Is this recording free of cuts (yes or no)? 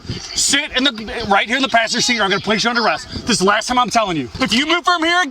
no